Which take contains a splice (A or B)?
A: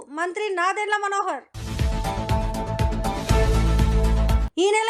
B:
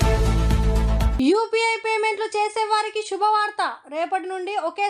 B